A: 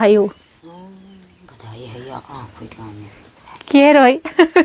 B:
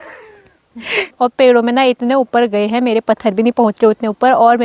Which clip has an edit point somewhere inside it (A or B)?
B